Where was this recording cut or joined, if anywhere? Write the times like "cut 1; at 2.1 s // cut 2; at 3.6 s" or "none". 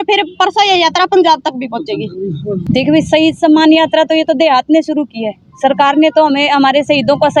none